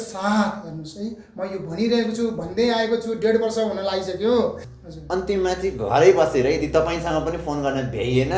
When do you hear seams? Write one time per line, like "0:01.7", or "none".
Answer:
0:04.7